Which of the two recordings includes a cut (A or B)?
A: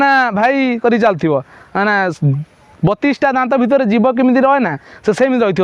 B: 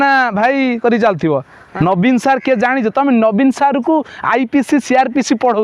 B